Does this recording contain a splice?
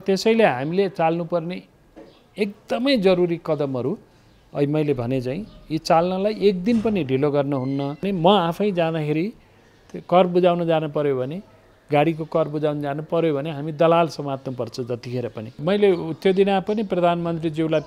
yes; 2 cuts; at 8.0 s, 15.6 s

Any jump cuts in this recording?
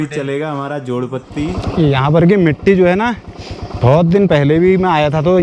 yes; 1 cut; at 1.6 s

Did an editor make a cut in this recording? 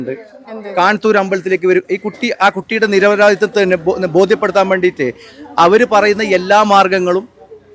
no; 0 cuts

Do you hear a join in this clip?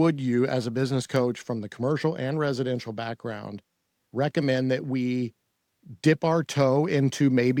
no; 0 cuts

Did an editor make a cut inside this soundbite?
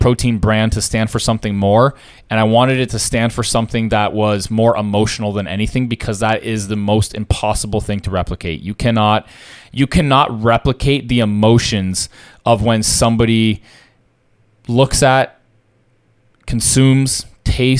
no; 0 cuts

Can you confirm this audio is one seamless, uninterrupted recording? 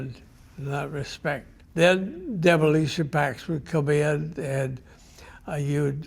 no; 1 cut; at 1.6 s

